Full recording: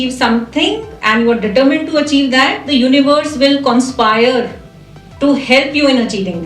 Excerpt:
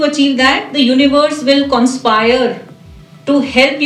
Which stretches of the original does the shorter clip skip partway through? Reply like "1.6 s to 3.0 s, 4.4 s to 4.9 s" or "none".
none